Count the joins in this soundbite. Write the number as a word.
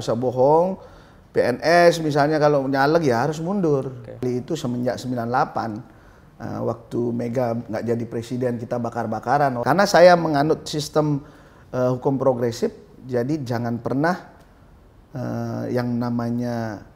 two